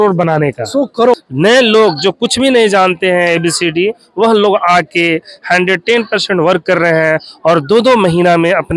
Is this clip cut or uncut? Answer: cut